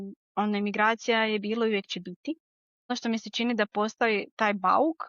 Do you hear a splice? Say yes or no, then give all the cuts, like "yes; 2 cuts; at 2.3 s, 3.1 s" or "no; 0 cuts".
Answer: yes; 1 cut; at 2.9 s